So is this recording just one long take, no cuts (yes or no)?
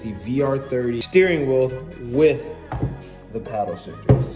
no